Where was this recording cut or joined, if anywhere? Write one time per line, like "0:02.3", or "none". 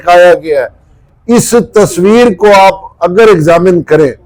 none